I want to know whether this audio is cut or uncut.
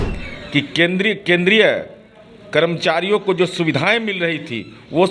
uncut